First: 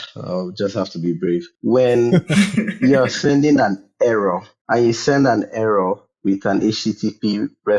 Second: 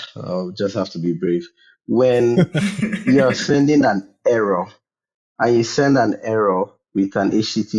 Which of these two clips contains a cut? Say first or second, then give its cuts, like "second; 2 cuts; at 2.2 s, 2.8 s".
first; 2 cuts; at 1.5 s, 4.5 s